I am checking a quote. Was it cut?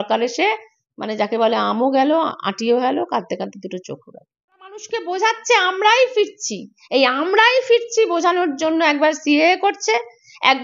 yes; 1 cut; at 4.9 s

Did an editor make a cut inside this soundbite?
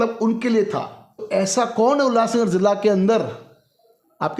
yes; 1 cut; at 1.2 s

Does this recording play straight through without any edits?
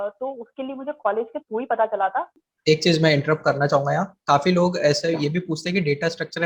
no; 1 cut; at 2.3 s

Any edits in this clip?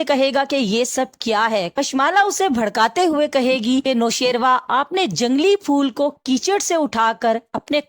no; 0 cuts

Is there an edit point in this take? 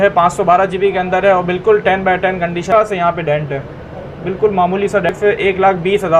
yes; 2 cuts; at 2.7 s, 5.1 s

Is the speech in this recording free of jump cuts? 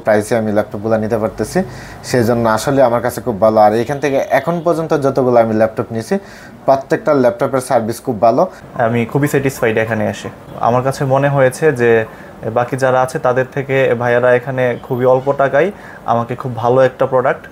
no; 2 cuts; at 8.6 s, 10.5 s

